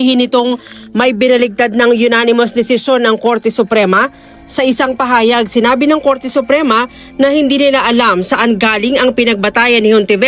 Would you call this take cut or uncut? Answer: cut